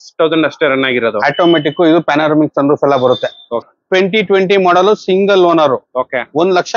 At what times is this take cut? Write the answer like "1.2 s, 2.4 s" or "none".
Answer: 3.7 s